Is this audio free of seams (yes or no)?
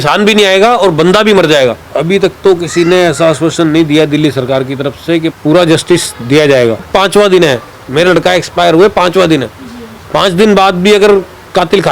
no